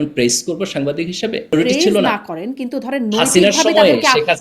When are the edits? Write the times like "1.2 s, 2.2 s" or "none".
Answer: 1.6 s